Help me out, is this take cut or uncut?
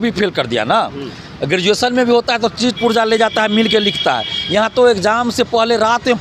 uncut